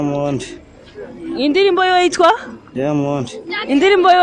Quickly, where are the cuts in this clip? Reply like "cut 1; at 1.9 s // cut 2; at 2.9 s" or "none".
none